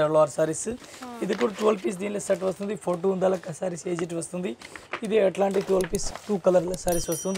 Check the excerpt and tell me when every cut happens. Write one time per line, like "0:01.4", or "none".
none

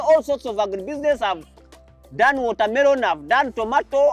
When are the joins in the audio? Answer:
none

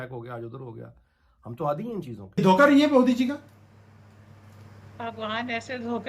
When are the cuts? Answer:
0:02.2

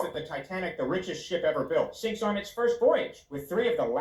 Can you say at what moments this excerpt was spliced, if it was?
none

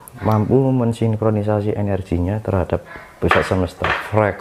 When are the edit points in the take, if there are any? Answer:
none

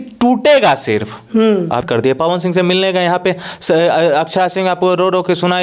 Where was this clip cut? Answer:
0:01.8

